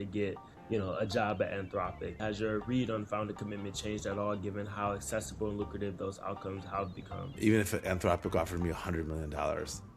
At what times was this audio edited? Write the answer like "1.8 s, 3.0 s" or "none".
2.2 s, 7.2 s